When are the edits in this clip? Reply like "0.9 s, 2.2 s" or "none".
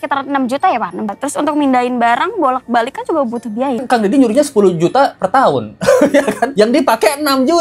1.1 s, 3.8 s, 6.5 s